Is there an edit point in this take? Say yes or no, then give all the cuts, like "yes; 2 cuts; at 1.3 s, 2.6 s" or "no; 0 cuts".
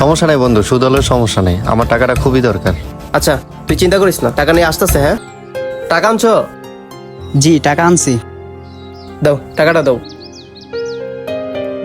yes; 1 cut; at 5.2 s